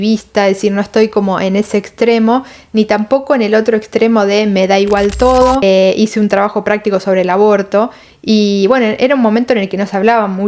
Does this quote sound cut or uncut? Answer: cut